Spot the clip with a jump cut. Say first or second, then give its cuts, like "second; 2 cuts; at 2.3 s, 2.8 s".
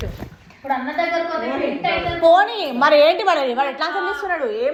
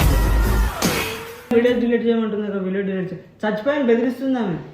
second; 1 cut; at 1.5 s